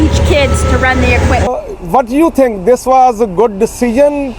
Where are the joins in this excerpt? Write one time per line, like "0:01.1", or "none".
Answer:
0:01.5